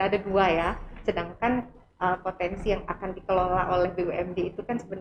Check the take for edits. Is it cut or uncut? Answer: uncut